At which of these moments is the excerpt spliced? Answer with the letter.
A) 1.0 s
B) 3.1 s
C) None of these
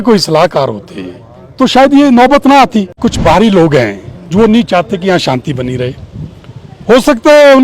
B